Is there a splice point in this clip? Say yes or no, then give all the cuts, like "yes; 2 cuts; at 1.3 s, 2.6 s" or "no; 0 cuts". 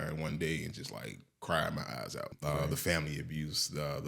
yes; 1 cut; at 2.3 s